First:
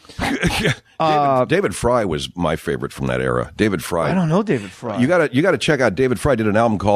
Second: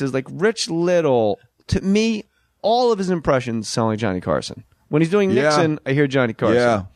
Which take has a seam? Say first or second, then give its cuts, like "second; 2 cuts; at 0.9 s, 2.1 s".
first; 1 cut; at 1.5 s